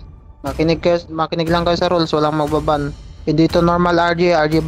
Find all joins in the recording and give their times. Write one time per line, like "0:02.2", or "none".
none